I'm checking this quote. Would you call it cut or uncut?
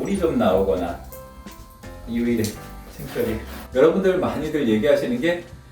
cut